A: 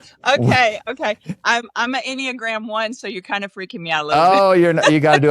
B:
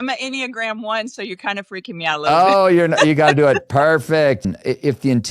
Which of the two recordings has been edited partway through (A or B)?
B